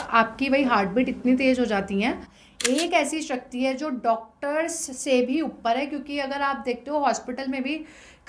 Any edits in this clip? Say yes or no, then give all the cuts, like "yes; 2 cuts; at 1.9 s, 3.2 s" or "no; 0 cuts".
yes; 1 cut; at 2.3 s